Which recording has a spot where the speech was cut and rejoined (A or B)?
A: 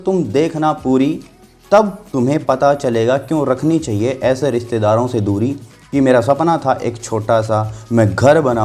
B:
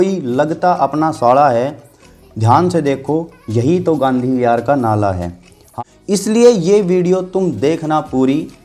B